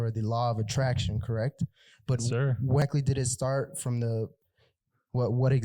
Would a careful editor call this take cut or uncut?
cut